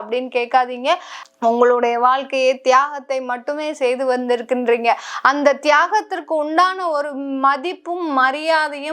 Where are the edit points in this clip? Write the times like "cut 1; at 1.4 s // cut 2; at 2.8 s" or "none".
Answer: cut 1; at 1.1 s